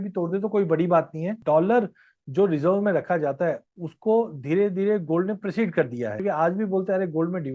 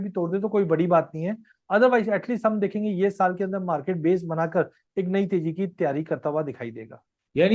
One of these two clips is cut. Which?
first; 2 cuts; at 1.4 s, 6.2 s

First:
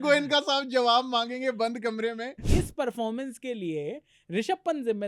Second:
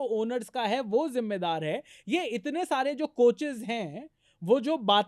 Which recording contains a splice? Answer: first; 1 cut; at 2.4 s

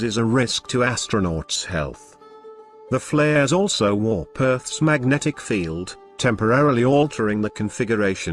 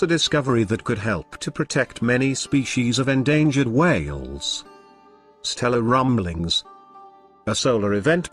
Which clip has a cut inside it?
first; 1 cut; at 3.5 s

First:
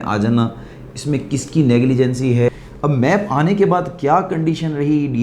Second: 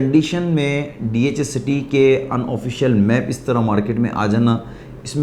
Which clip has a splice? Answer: first; 1 cut; at 2.5 s

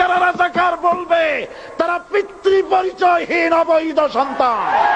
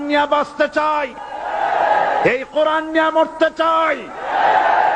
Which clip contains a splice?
second; 1 cut; at 1.2 s

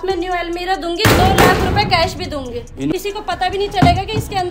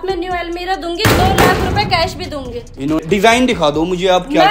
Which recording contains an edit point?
first; 1 cut; at 2.9 s

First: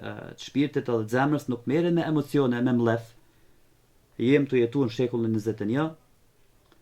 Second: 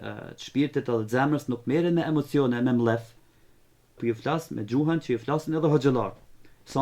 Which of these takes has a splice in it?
second; 1 cut; at 4.0 s

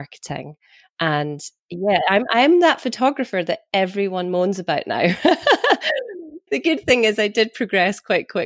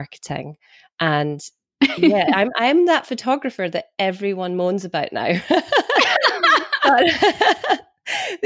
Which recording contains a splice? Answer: first; 2 cuts; at 1.8 s, 6.0 s

